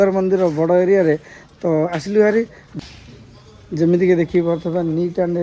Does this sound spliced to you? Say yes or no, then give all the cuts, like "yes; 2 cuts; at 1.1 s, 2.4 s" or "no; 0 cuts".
yes; 1 cut; at 2.6 s